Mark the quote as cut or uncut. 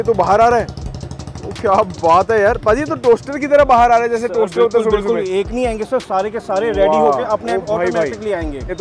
uncut